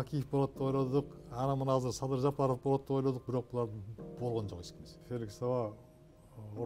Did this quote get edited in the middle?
yes; 1 cut; at 4.9 s

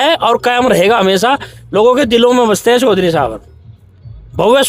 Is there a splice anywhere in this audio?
no; 0 cuts

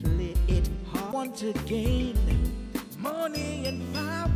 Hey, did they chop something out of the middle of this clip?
yes; 1 cut; at 1.1 s

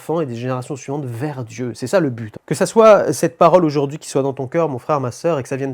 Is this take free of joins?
no; 1 cut; at 2.3 s

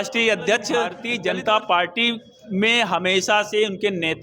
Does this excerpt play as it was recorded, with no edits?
no; 1 cut; at 1.0 s

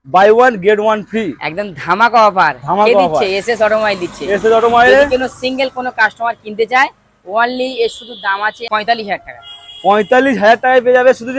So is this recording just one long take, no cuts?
yes; 0 cuts

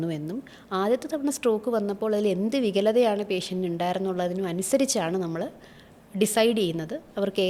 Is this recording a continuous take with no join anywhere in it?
yes; 0 cuts

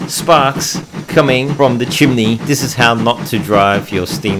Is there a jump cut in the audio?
yes; 2 cuts; at 1.5 s, 2.4 s

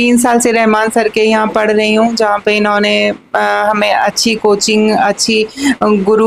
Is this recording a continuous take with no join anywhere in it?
yes; 0 cuts

